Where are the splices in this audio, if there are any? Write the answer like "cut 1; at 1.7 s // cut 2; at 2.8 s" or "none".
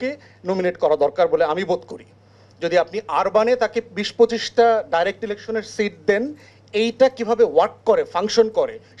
none